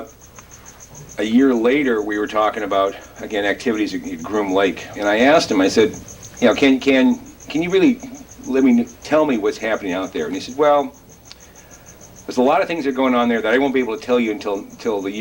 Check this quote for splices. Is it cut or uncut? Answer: cut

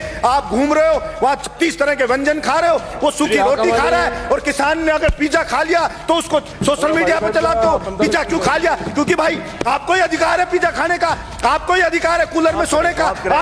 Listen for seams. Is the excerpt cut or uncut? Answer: uncut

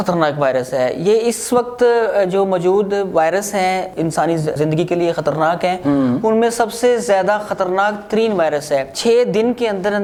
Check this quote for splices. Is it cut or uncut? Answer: uncut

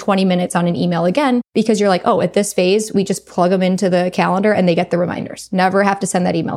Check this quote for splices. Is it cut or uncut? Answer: cut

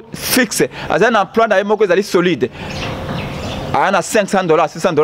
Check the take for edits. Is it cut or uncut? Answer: uncut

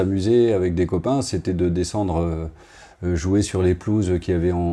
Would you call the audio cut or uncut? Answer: uncut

